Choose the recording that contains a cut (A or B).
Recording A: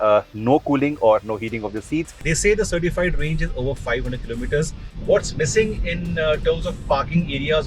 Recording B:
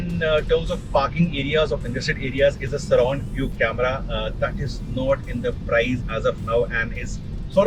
A